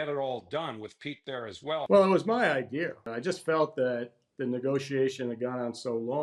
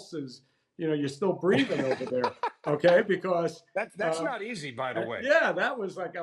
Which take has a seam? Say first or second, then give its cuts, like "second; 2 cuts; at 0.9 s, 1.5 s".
first; 2 cuts; at 1.9 s, 3.1 s